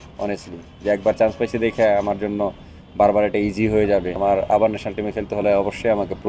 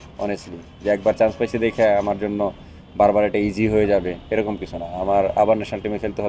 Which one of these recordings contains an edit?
first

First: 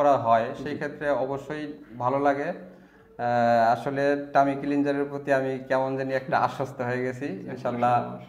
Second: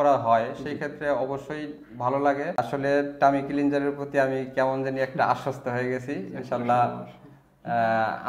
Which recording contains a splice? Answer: second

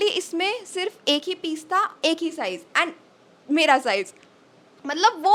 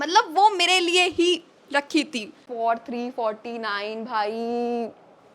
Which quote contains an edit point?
second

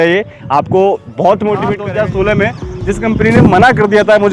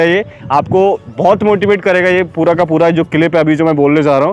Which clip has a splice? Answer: first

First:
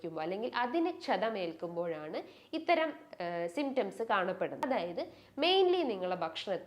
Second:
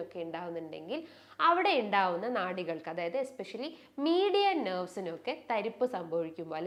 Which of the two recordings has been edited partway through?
first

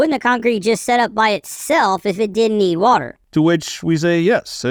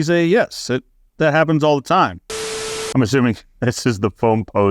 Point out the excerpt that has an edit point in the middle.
second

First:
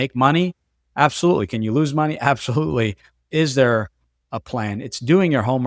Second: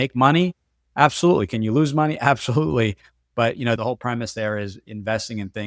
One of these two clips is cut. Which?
first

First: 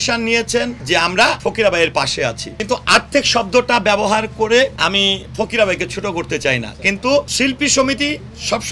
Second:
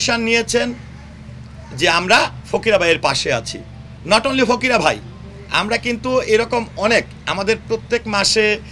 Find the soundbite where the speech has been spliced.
first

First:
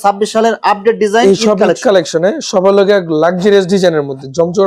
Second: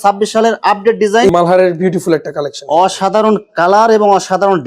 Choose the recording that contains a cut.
second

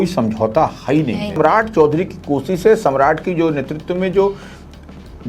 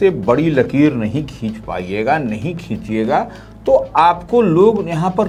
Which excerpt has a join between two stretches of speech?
first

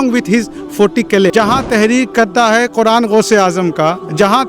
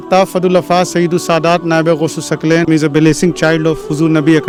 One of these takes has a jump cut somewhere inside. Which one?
first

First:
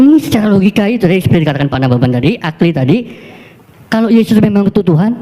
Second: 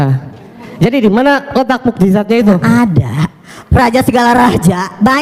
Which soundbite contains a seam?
second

